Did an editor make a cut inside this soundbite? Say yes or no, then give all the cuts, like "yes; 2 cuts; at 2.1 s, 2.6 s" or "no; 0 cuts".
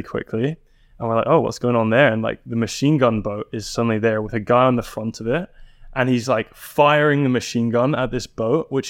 no; 0 cuts